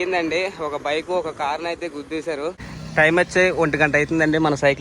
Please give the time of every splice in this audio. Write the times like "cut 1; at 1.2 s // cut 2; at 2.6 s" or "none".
cut 1; at 2.7 s